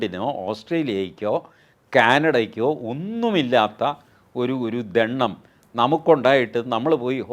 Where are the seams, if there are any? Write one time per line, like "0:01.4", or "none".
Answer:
none